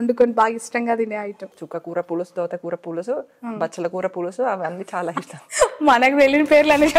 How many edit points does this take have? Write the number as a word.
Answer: one